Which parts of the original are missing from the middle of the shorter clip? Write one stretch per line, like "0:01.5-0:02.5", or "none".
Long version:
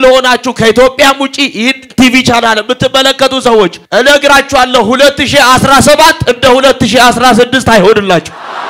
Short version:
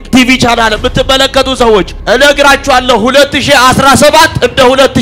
none